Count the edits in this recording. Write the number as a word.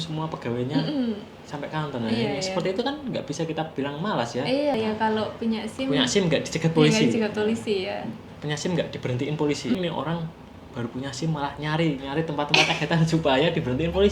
two